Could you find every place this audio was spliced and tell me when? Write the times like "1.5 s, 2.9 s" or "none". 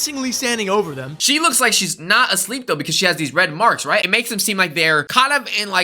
1.2 s, 4.1 s

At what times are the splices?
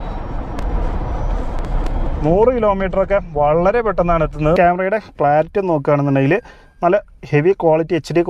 4.6 s

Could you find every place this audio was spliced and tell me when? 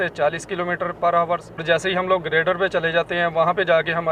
none

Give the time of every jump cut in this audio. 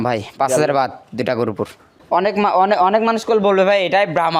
2.0 s

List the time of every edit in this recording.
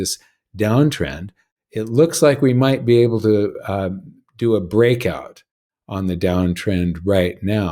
none

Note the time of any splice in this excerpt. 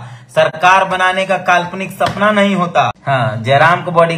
3.0 s

